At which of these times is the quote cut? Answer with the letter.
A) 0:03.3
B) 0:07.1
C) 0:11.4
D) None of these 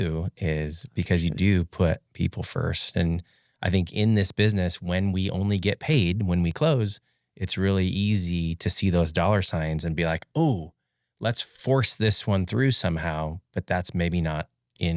D